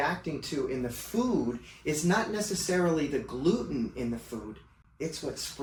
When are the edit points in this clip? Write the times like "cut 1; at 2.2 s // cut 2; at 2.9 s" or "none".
none